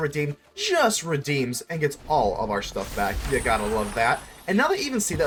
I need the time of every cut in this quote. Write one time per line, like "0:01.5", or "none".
none